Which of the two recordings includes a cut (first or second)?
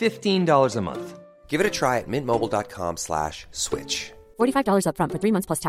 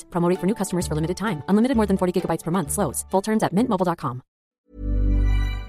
second